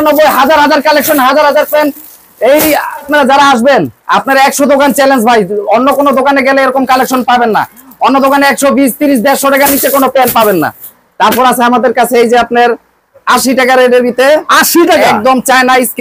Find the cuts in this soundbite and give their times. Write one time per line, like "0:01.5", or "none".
none